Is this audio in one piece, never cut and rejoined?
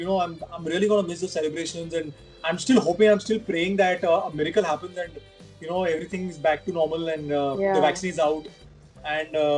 yes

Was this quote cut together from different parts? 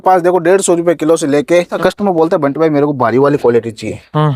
yes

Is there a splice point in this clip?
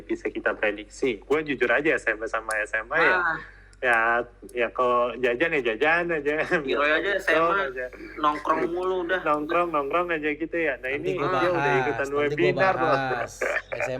yes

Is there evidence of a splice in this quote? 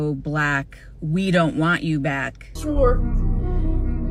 yes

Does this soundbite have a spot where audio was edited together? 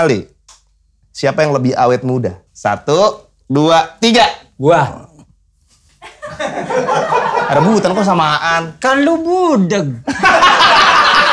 no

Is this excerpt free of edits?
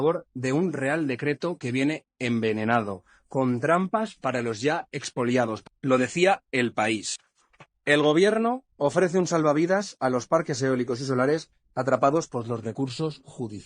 yes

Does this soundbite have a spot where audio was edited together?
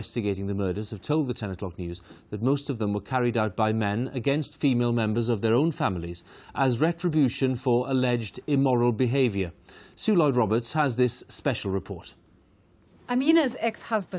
no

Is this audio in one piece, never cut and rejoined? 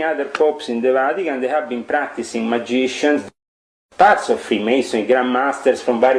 no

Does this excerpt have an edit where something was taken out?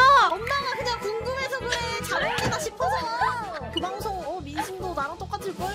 no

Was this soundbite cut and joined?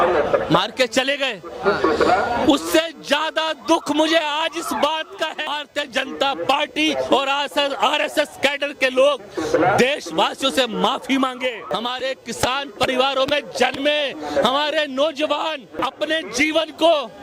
yes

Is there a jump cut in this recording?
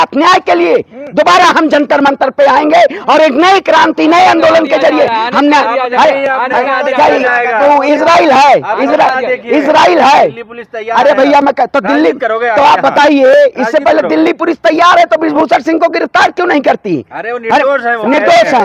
no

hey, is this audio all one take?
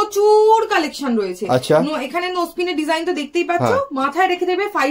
yes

